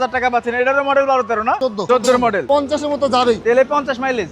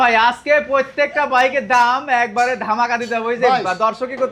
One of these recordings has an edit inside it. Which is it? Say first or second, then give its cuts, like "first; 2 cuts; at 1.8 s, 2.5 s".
first; 2 cuts; at 1.7 s, 2.4 s